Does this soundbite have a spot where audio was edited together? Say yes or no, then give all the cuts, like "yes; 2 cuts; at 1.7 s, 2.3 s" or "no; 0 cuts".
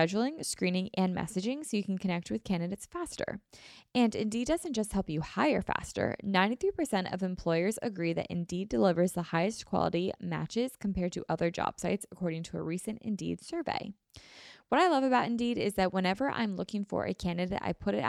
no; 0 cuts